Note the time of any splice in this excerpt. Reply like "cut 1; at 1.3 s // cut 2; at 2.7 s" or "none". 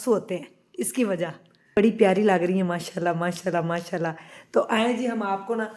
cut 1; at 1.7 s